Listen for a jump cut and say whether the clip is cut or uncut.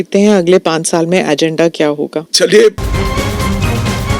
cut